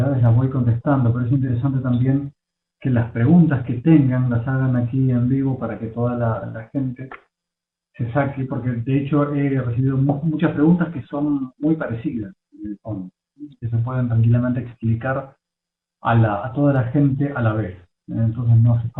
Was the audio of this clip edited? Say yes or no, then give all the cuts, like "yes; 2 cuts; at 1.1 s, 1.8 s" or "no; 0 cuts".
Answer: yes; 1 cut; at 6.6 s